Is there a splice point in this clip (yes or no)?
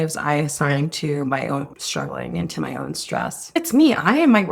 yes